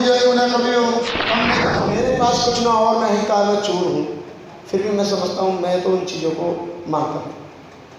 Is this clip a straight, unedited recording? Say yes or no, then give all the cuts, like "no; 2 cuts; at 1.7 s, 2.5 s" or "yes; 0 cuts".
no; 1 cut; at 1.7 s